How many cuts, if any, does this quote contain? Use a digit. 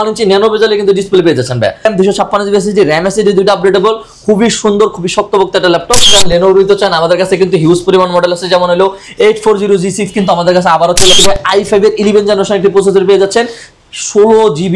3